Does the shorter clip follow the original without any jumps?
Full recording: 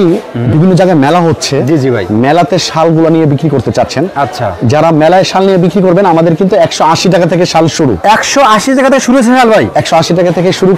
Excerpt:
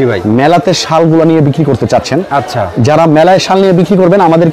yes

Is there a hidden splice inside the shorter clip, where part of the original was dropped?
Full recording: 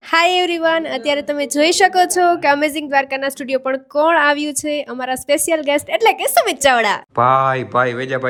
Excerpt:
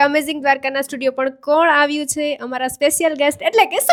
no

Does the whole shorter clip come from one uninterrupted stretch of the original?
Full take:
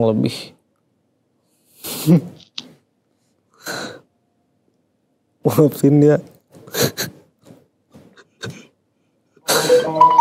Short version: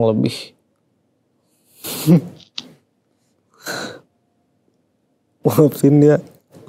yes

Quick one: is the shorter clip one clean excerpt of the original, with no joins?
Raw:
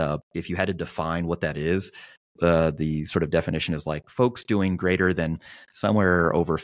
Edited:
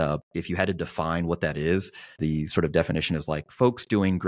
no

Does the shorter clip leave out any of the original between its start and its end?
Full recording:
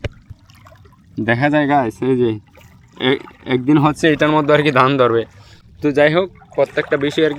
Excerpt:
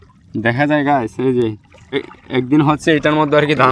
yes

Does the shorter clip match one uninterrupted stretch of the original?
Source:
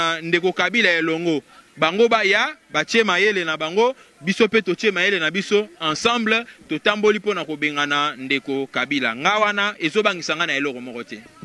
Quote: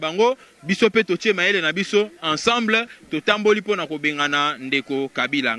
yes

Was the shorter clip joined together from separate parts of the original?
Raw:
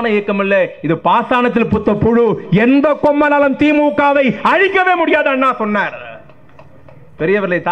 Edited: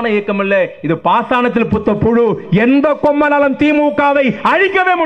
no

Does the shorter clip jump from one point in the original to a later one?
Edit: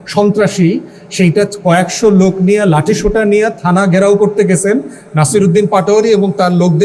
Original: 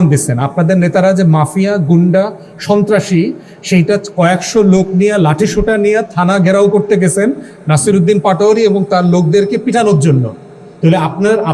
no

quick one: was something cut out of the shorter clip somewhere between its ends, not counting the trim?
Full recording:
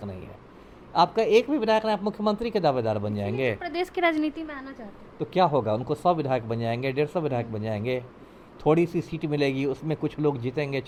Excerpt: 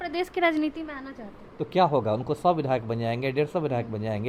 no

